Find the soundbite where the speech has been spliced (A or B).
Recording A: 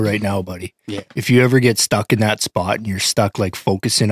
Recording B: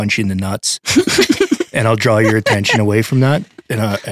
A